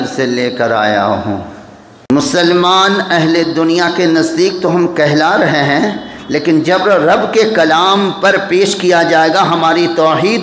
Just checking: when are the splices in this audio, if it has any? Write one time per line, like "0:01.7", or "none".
0:02.1